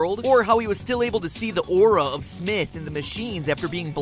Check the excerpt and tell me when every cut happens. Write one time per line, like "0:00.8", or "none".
0:02.1